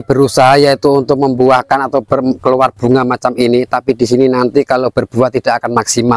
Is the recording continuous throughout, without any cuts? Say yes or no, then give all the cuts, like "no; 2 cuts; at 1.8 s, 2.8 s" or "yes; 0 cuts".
yes; 0 cuts